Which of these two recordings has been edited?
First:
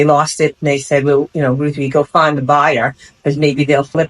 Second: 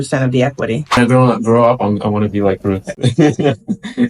second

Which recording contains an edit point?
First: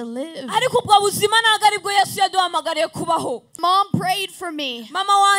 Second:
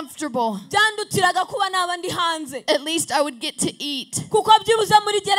first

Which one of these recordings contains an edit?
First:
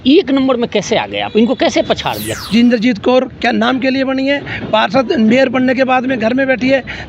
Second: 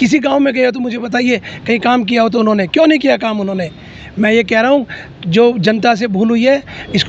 first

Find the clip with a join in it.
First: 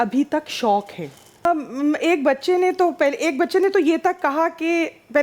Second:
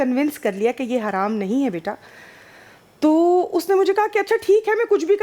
first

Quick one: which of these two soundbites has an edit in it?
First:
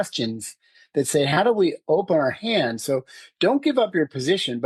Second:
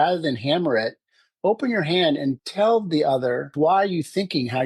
second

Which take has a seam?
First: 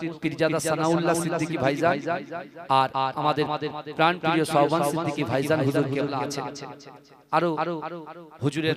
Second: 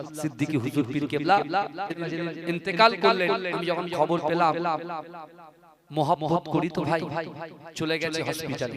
second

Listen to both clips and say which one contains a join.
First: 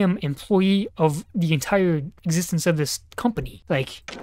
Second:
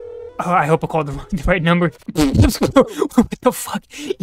second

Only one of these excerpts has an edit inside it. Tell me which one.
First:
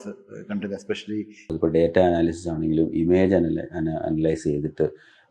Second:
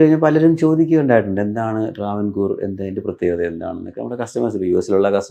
first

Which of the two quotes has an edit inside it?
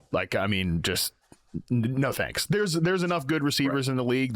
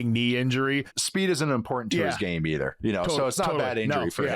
second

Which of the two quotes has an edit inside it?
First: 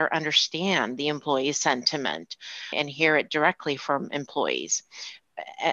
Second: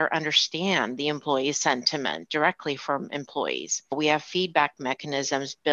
second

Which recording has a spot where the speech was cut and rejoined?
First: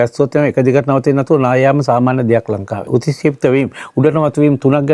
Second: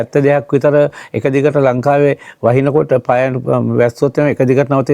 first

